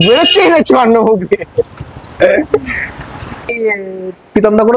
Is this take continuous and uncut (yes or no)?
no